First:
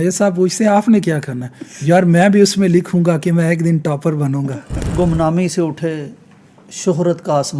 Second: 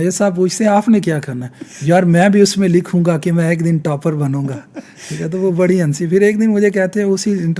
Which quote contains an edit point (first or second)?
first